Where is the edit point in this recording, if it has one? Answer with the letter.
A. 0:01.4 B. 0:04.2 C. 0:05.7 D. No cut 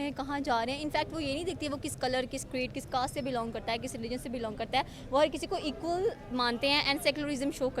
D